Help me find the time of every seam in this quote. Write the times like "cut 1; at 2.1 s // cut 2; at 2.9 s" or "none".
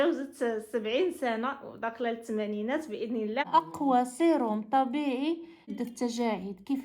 cut 1; at 3.5 s // cut 2; at 5.6 s